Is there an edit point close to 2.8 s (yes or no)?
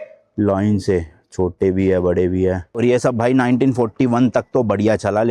yes